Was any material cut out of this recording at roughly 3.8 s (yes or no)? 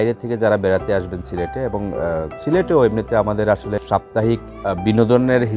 yes